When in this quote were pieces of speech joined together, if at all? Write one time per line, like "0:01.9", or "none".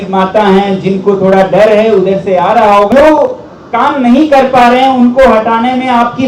0:02.9